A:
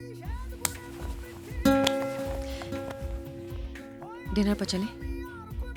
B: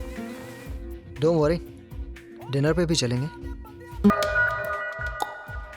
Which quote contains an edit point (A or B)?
B